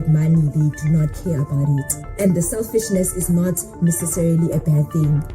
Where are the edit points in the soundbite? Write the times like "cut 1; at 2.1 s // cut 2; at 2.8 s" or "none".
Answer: cut 1; at 2.0 s